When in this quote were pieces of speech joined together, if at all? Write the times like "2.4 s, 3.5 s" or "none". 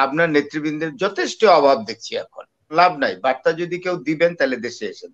2.7 s